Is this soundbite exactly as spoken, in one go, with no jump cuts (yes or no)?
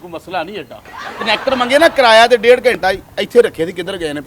no